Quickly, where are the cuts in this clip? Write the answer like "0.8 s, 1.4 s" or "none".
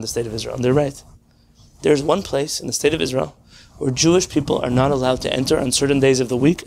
none